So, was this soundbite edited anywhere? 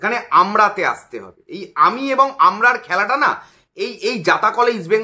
no; 0 cuts

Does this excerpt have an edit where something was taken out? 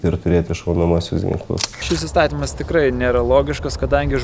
yes; 1 cut; at 1.8 s

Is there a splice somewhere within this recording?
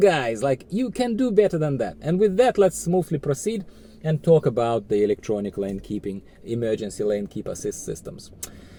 no; 0 cuts

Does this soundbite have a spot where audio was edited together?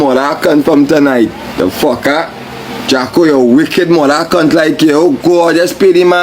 no; 0 cuts

